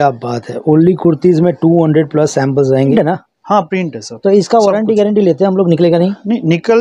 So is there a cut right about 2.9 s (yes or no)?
yes